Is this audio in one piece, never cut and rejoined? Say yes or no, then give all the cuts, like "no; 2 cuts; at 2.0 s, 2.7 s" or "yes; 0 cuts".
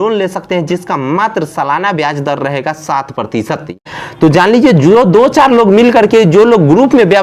no; 1 cut; at 3.8 s